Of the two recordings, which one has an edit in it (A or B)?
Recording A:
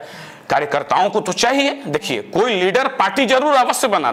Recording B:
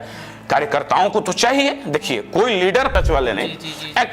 B